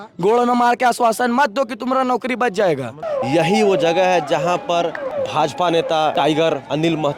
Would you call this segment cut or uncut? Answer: cut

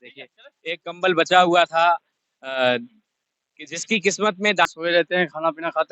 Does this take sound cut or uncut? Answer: cut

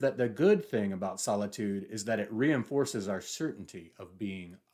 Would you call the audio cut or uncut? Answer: uncut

